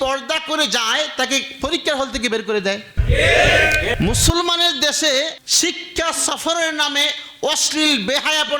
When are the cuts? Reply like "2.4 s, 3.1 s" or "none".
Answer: 3.9 s

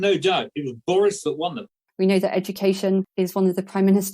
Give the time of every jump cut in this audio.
1.7 s

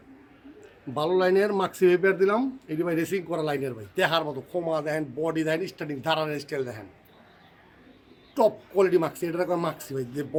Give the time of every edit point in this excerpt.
none

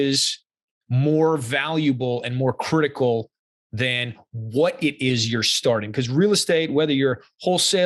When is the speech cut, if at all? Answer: none

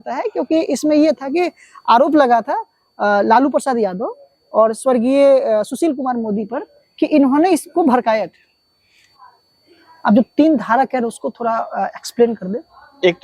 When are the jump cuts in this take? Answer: 9.1 s

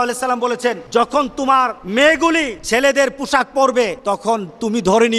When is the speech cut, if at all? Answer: 0.8 s, 1.8 s, 2.6 s, 4.0 s

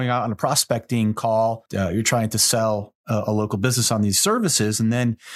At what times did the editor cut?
1.7 s

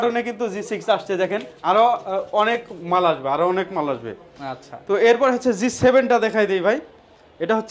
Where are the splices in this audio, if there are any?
none

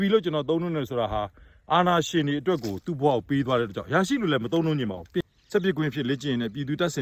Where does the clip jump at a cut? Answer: 5.2 s

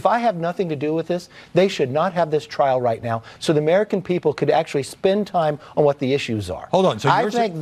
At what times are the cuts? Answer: none

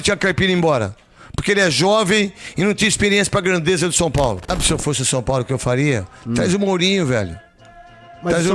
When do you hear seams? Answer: 4.5 s

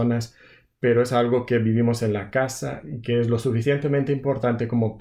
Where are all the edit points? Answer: none

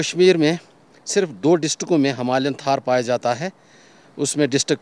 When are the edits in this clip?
none

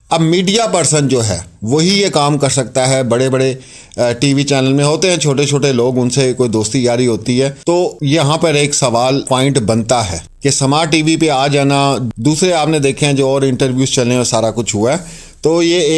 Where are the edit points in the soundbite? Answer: none

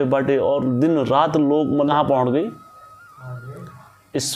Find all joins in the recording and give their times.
1.9 s

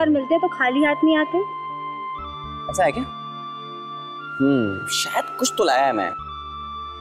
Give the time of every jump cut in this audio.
none

